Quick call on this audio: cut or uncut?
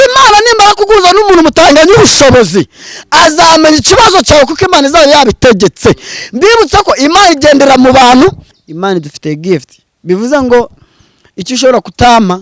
cut